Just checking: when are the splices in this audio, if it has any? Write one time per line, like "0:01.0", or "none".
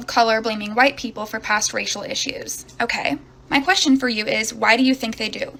none